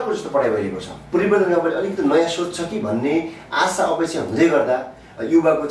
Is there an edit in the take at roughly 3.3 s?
no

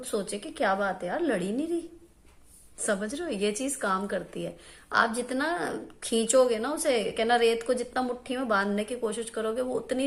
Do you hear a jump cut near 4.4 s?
no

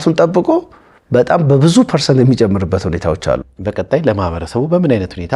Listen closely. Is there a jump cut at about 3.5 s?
yes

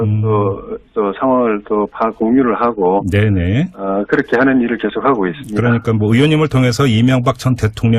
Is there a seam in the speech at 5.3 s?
no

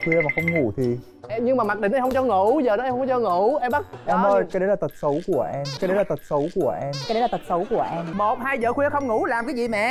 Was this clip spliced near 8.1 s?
yes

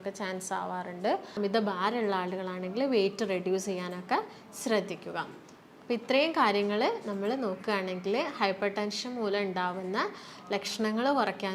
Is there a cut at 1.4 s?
yes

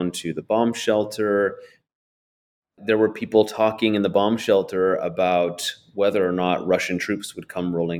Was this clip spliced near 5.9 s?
no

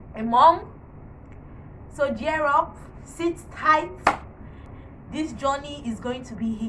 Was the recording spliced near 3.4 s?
no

